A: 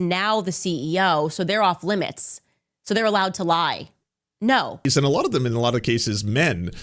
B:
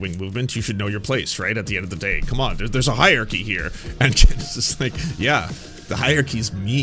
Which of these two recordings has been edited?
A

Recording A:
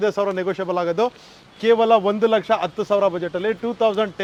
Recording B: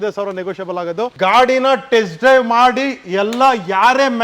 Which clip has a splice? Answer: B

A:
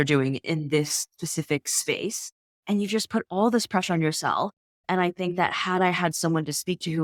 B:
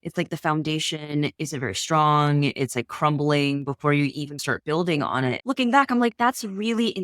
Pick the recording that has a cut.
B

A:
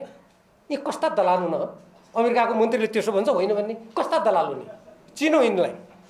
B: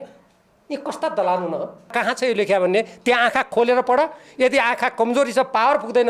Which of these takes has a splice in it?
B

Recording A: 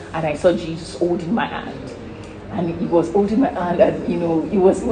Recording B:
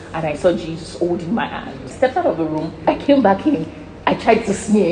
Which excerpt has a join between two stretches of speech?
B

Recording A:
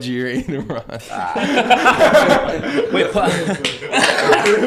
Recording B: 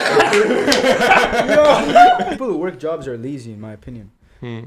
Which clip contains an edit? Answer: B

